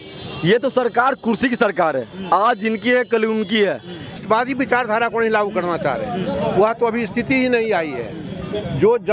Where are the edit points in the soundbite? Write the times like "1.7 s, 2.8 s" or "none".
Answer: 4.2 s